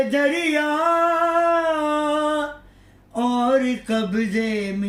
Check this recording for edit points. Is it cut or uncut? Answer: uncut